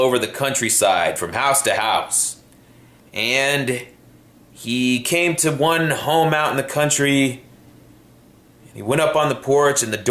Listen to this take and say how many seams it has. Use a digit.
0